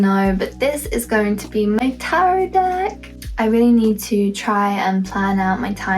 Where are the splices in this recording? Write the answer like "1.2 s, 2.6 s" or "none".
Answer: 3.1 s